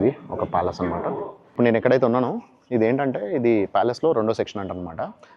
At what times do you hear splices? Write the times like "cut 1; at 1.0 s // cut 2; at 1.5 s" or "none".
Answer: cut 1; at 1.5 s

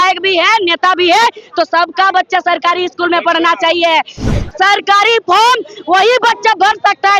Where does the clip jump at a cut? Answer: cut 1; at 4.3 s

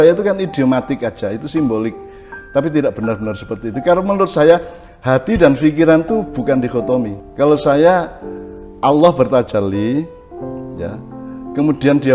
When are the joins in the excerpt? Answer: cut 1; at 7.2 s

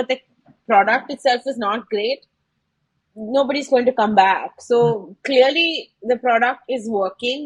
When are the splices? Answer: none

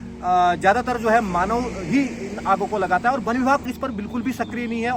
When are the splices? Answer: cut 1; at 3.7 s

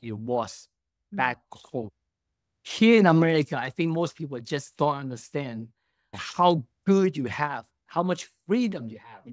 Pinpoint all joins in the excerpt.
cut 1; at 6.2 s

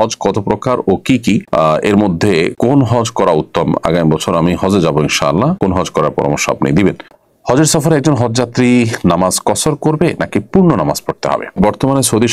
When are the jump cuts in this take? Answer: cut 1; at 7.0 s // cut 2; at 11.6 s

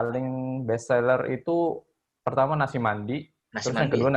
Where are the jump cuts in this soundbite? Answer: none

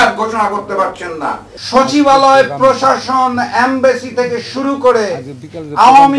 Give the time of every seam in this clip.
cut 1; at 1.5 s

